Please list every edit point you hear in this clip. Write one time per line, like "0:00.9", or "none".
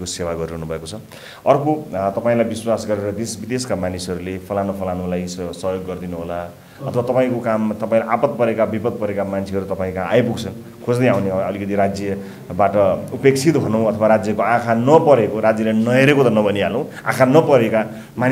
none